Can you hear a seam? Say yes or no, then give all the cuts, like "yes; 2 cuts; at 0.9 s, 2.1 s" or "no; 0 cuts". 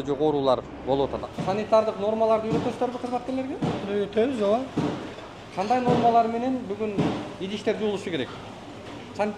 yes; 1 cut; at 1.2 s